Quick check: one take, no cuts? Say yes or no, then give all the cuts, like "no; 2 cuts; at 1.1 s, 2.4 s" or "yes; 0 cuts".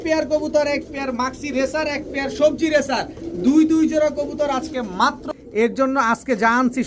no; 1 cut; at 5.2 s